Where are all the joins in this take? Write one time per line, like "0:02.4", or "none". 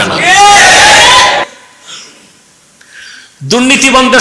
none

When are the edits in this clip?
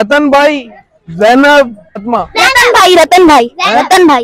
0:02.0

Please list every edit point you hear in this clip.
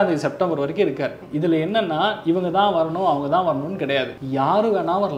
0:01.2
0:04.2

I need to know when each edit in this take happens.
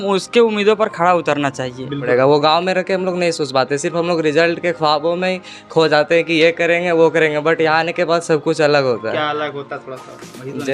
0:02.0

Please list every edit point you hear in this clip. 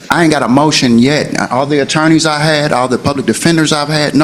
none

